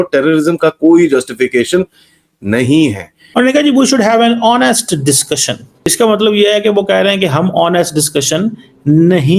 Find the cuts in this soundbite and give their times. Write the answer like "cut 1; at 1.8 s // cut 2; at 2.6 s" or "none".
cut 1; at 3.1 s // cut 2; at 5.9 s

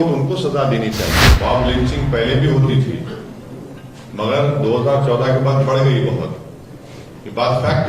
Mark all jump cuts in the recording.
cut 1; at 1.3 s

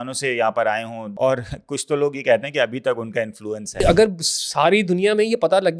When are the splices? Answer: cut 1; at 1.1 s // cut 2; at 3.8 s

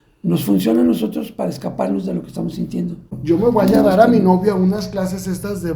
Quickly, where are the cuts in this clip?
cut 1; at 3.1 s

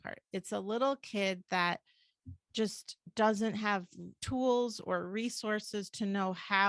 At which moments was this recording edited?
none

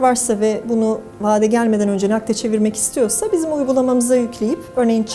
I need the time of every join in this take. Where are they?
none

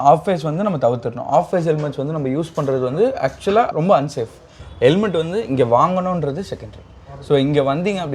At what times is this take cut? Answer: cut 1; at 4.6 s

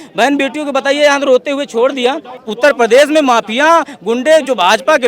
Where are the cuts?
cut 1; at 2.4 s

